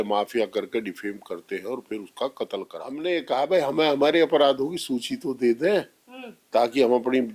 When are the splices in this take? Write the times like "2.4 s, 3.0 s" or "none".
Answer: 2.8 s